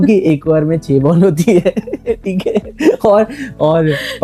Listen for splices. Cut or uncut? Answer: uncut